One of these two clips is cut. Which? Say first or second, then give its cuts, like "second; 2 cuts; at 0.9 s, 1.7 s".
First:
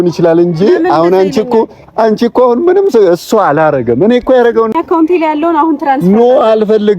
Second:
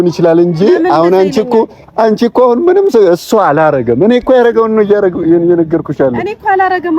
first; 1 cut; at 4.7 s